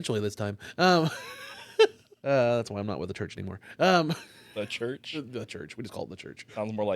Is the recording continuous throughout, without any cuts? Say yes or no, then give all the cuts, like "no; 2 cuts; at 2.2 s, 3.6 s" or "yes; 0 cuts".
no; 1 cut; at 2.1 s